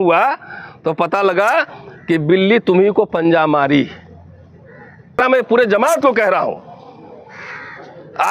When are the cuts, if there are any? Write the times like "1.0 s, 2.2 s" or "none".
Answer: 5.2 s